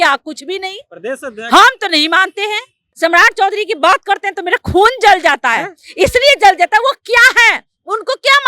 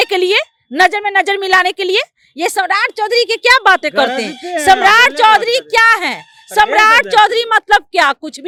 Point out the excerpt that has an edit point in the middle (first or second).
first